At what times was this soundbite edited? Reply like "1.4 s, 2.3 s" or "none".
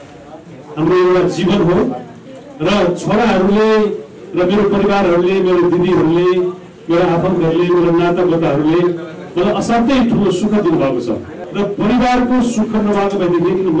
11.4 s